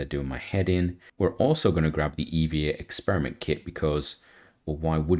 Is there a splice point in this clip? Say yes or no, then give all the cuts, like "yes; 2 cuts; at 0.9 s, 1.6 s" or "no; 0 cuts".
no; 0 cuts